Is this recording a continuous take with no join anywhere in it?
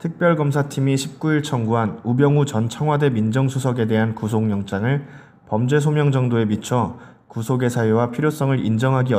no; 1 cut; at 7.1 s

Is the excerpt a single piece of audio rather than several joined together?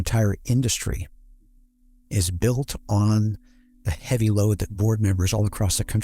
yes; 0 cuts

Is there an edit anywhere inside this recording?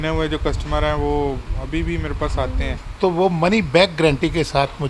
yes; 1 cut; at 2.8 s

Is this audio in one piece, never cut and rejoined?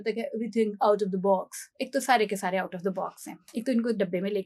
yes; 0 cuts

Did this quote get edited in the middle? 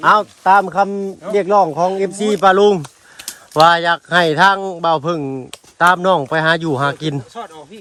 no; 0 cuts

